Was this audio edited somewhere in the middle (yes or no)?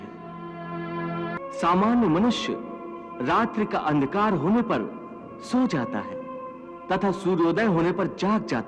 yes